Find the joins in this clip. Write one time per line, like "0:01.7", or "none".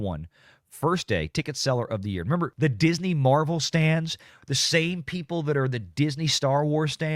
0:02.5